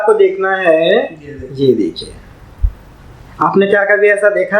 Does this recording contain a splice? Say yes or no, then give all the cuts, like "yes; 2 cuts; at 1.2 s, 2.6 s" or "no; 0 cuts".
no; 0 cuts